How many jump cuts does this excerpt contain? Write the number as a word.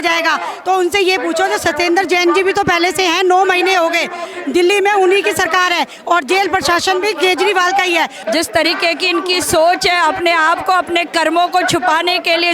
one